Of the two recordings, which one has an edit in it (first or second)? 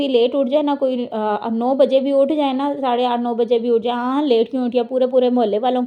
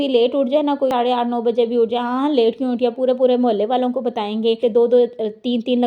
second